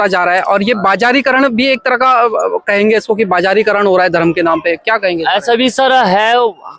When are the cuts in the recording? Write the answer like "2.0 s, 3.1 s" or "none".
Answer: none